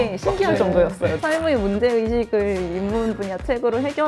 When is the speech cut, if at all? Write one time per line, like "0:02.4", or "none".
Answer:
0:01.2